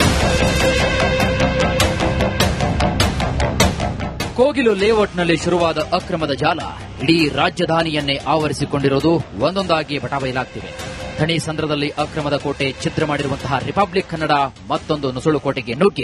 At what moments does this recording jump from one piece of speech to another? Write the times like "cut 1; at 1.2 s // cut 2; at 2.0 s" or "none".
cut 1; at 1.2 s